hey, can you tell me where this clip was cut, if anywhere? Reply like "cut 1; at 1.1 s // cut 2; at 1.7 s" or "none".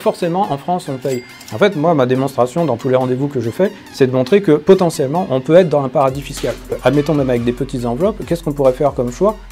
cut 1; at 6.8 s